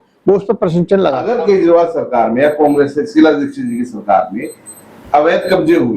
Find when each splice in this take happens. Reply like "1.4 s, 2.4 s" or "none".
1.2 s